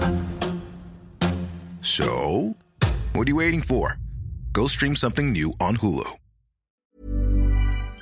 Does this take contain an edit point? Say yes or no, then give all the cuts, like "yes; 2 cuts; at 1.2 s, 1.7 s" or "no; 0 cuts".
yes; 1 cut; at 6.8 s